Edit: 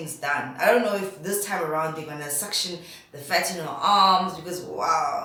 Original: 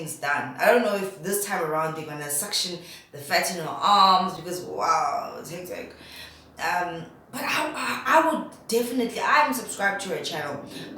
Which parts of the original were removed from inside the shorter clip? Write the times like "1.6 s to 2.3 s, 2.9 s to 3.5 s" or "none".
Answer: none